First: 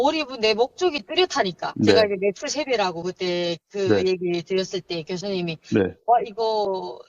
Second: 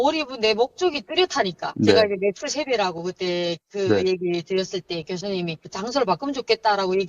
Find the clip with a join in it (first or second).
second